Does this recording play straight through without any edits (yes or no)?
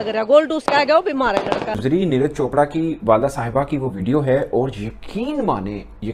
no